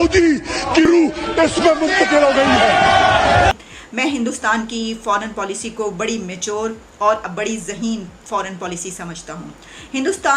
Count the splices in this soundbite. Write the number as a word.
one